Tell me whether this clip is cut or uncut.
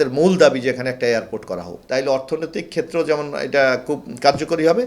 cut